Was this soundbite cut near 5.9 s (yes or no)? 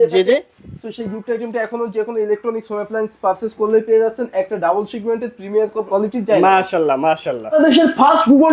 yes